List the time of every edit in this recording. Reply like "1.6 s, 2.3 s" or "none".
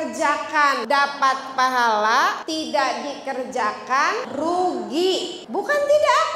0.8 s, 2.4 s, 4.3 s, 5.4 s